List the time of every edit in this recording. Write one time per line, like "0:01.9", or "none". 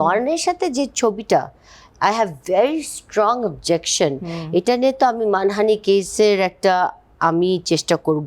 none